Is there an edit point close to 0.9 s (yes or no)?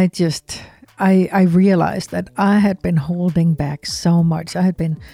yes